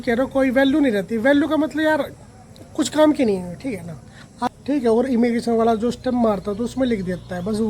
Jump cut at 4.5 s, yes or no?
yes